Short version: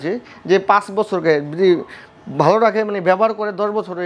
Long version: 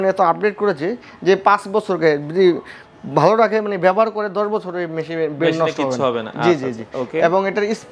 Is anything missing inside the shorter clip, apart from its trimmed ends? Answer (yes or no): no